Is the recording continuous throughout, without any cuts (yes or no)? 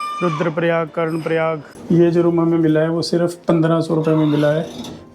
no